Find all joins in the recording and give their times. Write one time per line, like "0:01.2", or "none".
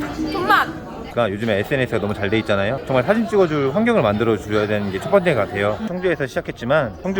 0:01.1
0:05.8